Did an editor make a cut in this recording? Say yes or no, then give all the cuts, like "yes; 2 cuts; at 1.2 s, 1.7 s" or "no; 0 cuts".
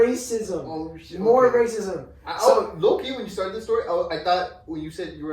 no; 0 cuts